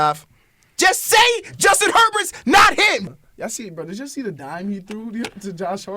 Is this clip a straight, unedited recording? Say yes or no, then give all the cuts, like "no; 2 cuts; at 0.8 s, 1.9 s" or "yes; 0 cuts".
no; 1 cut; at 3.1 s